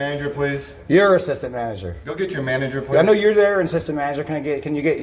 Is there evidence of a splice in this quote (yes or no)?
no